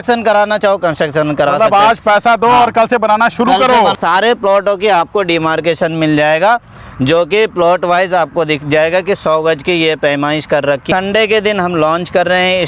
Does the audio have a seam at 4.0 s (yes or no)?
yes